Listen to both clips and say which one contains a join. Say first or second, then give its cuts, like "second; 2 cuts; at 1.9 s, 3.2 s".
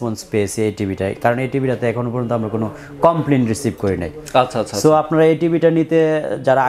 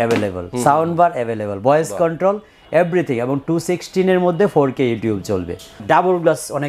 second; 1 cut; at 5.8 s